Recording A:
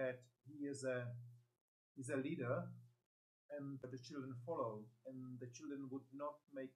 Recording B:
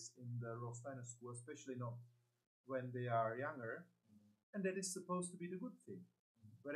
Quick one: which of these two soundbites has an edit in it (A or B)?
A